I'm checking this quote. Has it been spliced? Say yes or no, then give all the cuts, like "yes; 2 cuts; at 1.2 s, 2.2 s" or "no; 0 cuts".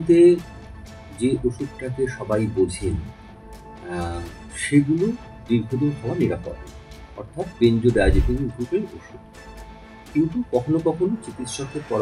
no; 0 cuts